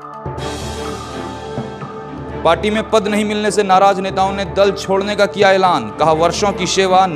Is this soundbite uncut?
no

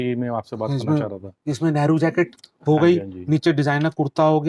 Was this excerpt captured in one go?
yes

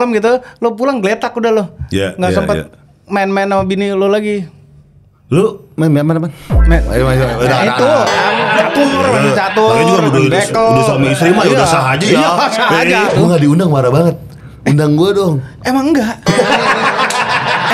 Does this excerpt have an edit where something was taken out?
yes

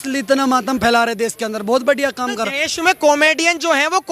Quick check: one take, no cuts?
yes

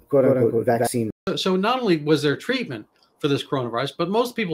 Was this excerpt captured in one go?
no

